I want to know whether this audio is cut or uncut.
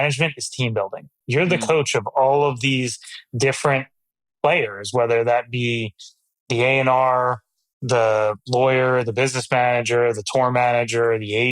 cut